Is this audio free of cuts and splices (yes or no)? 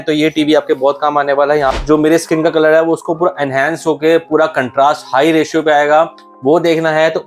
no